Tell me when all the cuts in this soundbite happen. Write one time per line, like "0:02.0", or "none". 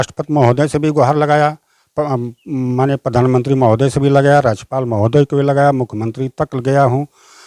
none